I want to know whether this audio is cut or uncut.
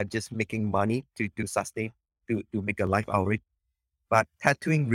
cut